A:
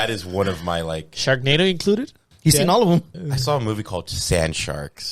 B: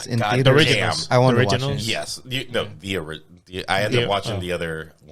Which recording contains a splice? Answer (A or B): A